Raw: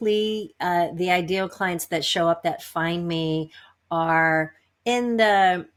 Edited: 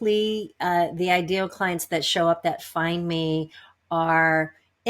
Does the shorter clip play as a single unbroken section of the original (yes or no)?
yes